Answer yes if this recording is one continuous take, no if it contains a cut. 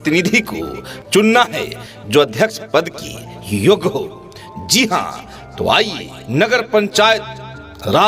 yes